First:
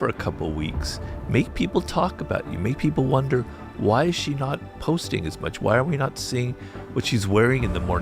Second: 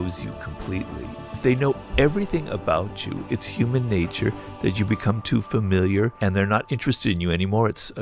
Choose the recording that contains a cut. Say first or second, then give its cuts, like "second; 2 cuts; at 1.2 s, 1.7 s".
second; 2 cuts; at 1.4 s, 6.1 s